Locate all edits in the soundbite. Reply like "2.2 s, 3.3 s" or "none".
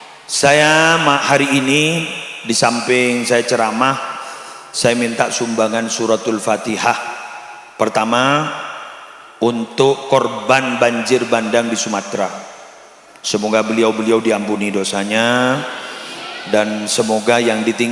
none